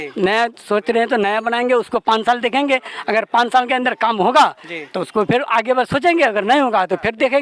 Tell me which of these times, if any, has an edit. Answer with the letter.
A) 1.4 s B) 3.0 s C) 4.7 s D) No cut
D